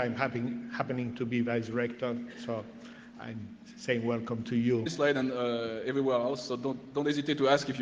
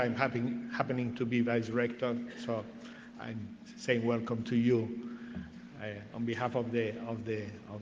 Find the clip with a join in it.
second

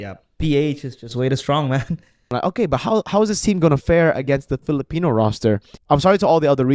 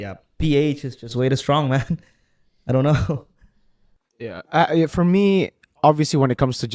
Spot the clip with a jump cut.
first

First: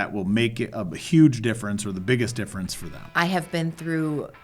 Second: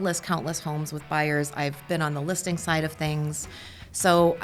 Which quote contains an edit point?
first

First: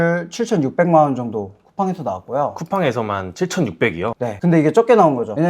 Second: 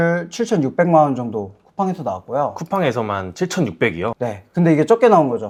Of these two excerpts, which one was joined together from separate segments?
first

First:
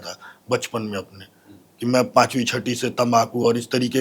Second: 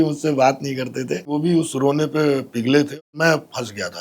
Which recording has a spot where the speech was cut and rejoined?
second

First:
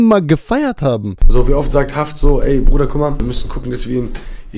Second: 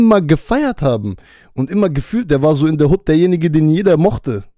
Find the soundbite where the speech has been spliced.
first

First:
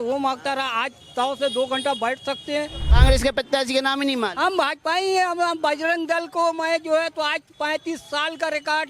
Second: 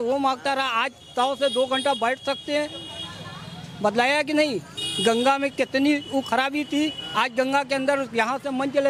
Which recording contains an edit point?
first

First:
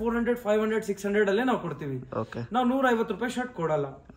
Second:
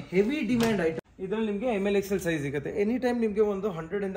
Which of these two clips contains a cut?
second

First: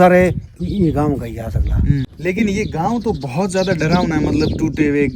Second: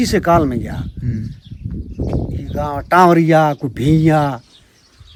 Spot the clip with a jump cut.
first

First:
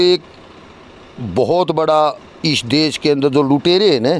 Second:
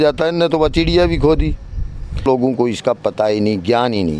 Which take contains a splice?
second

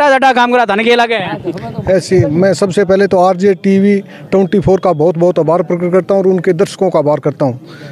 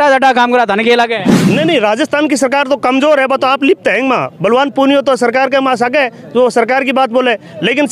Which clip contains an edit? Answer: second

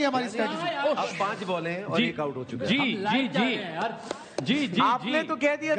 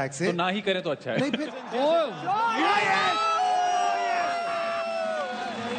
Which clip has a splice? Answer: second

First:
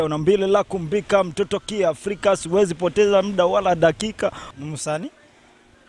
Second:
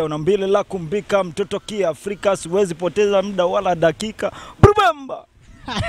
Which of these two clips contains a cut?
first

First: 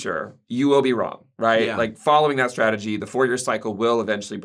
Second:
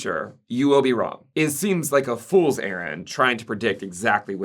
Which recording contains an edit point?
second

